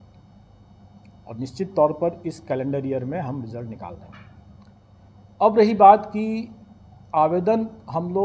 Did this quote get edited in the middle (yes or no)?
no